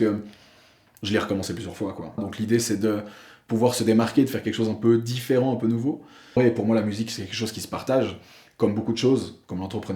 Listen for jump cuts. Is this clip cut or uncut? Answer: cut